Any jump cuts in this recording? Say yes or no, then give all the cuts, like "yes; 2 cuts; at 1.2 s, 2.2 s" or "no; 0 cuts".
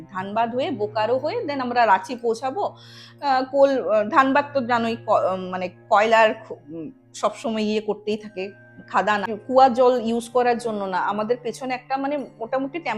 yes; 1 cut; at 9.3 s